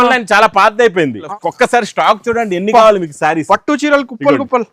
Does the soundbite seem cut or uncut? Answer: cut